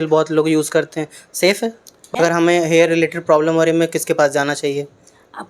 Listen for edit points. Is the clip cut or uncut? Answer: cut